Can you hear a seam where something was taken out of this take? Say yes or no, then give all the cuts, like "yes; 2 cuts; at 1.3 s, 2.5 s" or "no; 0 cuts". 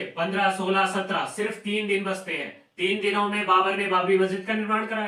no; 0 cuts